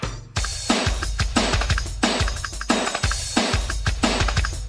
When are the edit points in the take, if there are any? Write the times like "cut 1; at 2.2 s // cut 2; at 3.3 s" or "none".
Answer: cut 1; at 2.1 s